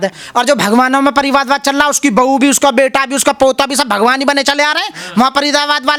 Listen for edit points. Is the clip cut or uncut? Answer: uncut